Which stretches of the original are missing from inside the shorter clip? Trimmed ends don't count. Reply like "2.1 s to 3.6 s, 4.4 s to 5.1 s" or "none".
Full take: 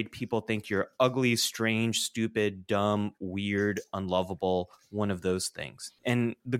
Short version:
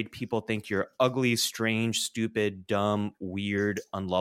none

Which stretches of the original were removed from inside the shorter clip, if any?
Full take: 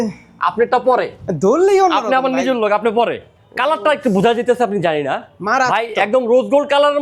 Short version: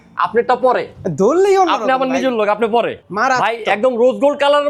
3.3 s to 5.3 s

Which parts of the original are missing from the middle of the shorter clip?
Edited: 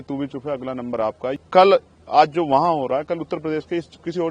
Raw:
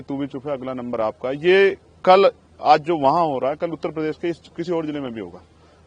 1.3 s to 1.9 s

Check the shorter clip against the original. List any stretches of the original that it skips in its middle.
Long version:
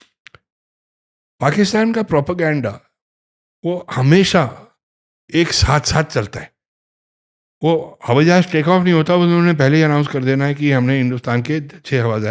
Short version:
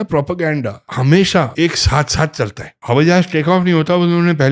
2.9 s to 3.9 s, 4.5 s to 5.3 s, 6.5 s to 7.9 s

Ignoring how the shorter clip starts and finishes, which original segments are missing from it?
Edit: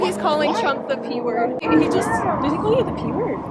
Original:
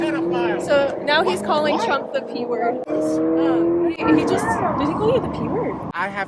2.9 s to 4.0 s

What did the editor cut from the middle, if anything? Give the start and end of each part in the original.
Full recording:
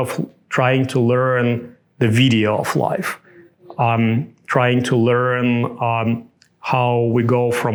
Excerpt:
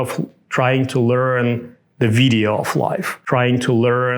3.1 s to 4.4 s

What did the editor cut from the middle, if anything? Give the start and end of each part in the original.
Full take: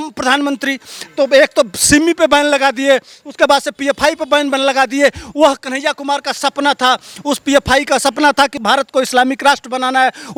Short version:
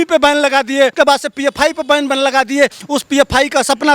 3.0 s to 3.3 s, 5.2 s to 7.2 s

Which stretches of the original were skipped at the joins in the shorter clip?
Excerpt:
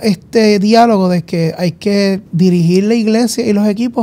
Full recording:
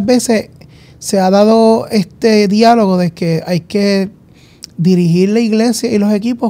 4.1 s to 4.7 s

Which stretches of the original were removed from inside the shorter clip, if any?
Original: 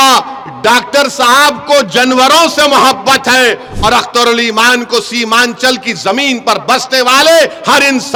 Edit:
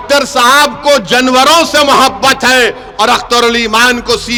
none

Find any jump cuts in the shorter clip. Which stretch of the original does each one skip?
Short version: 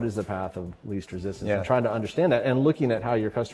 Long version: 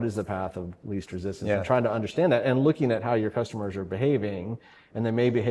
none

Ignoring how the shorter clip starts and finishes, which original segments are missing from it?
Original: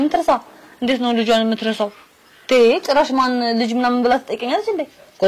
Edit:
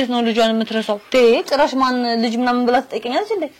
1.9 s to 2.4 s

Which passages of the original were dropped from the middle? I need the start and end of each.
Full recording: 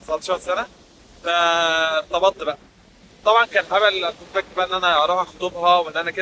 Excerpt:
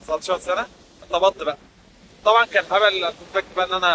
1.1 s to 2.1 s

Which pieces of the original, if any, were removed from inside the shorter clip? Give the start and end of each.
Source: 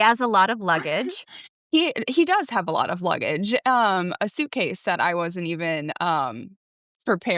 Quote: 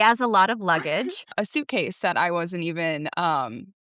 1.3 s to 4.1 s

